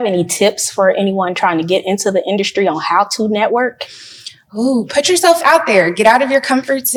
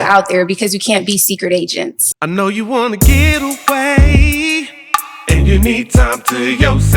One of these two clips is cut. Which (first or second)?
second